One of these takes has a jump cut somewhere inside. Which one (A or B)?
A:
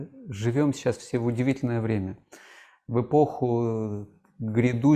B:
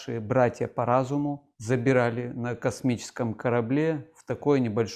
B